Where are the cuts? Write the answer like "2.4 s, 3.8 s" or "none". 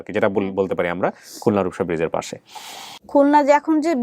2.9 s